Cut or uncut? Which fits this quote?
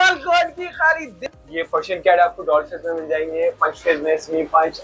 cut